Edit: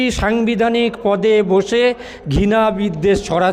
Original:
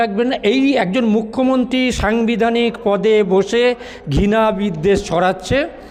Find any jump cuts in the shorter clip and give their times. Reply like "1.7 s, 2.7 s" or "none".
none